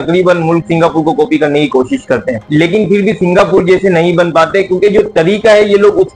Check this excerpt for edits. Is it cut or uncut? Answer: uncut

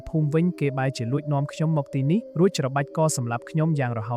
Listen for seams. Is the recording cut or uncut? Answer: cut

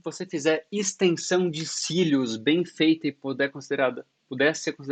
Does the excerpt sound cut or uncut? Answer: uncut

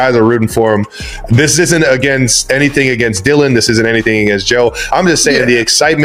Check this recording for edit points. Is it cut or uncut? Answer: uncut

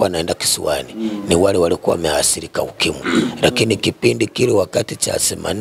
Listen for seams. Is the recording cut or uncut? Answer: uncut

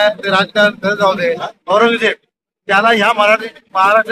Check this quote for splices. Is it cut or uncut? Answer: cut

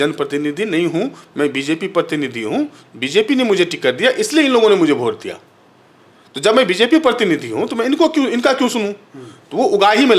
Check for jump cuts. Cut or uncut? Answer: uncut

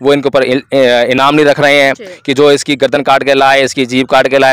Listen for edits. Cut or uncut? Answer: uncut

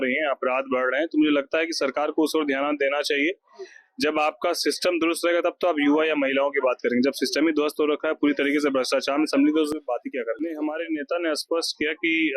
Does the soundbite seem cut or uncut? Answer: cut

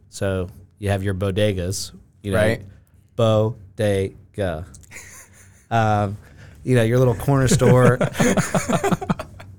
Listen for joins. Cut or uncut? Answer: uncut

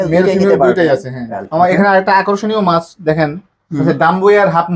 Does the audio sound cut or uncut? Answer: cut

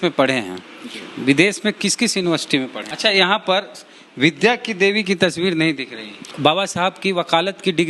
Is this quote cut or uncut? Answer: cut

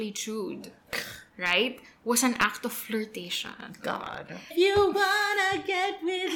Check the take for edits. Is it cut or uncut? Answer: cut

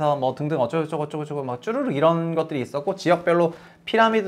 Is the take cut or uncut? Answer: uncut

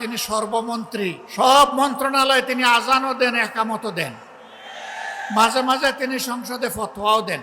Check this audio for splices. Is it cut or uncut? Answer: cut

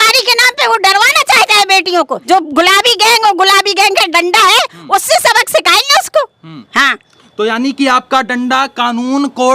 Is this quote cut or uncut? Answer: cut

